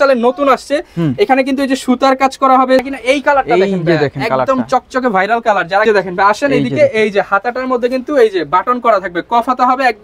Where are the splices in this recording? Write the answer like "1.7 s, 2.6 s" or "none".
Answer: 2.8 s, 5.8 s